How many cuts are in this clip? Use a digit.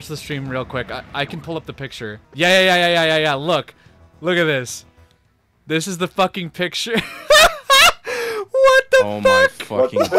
1